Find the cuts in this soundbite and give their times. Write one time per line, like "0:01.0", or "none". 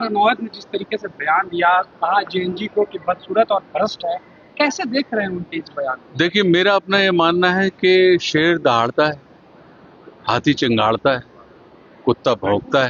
none